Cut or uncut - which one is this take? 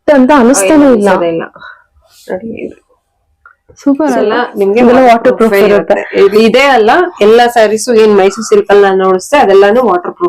cut